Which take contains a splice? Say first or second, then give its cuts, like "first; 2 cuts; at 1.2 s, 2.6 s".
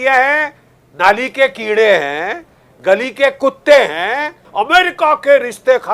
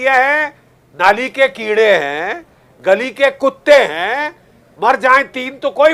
first; 1 cut; at 4.4 s